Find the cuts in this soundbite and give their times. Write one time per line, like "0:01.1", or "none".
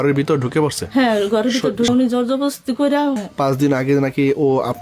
0:01.9
0:03.2